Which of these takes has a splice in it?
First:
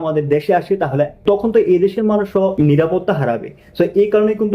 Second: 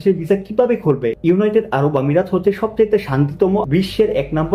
first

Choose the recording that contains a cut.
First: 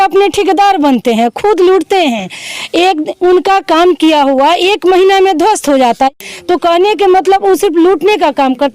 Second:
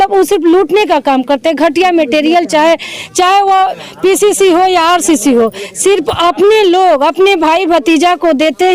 first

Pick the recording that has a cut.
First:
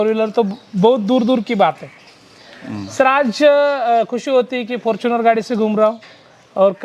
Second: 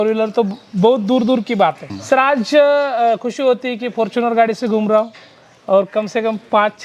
second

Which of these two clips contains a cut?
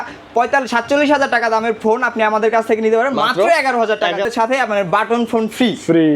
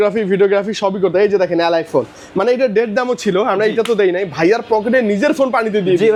first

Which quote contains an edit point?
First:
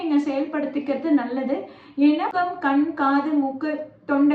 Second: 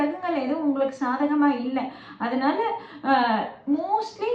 first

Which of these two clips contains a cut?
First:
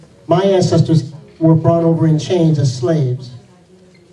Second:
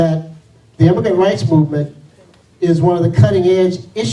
second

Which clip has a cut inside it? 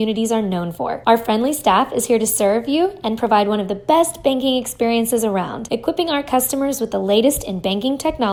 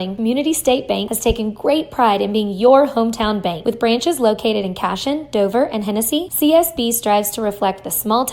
second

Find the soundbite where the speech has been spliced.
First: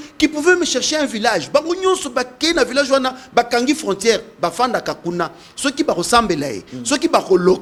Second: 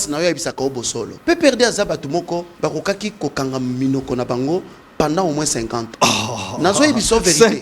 second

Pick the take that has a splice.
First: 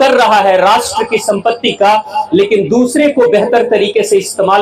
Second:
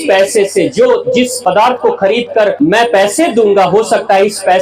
second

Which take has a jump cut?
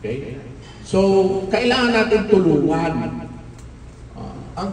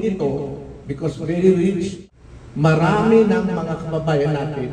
second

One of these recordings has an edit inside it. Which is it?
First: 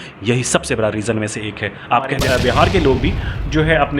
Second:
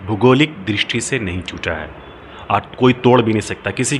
first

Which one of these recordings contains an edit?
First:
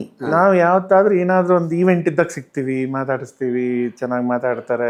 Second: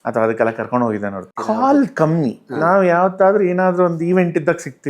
second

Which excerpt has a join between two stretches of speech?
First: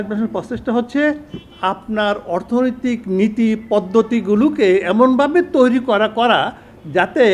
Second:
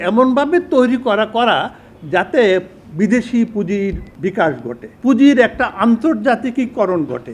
second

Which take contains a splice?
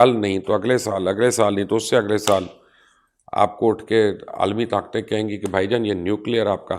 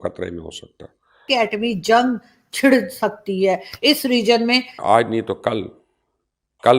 second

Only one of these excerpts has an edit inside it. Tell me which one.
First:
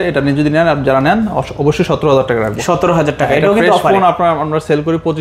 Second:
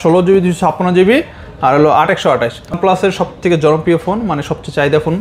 second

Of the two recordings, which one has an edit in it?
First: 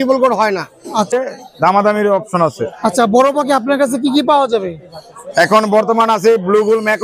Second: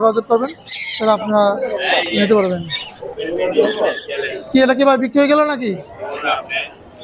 first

